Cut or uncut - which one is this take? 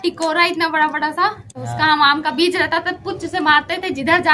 uncut